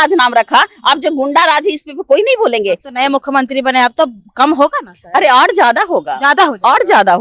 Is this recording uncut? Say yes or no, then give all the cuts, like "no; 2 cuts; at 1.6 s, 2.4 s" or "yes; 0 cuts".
yes; 0 cuts